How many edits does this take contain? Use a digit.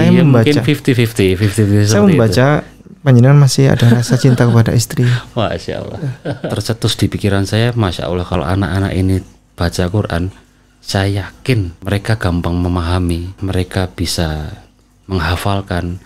4